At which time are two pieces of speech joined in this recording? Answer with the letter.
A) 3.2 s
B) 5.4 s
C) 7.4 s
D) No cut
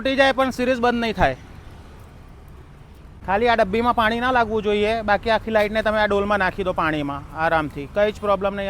A